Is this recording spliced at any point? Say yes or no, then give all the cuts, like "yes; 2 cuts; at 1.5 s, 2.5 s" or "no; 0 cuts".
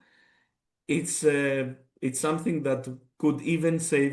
no; 0 cuts